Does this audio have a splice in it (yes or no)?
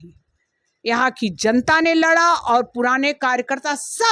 no